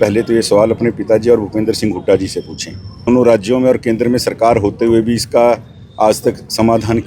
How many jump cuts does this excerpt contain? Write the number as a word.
one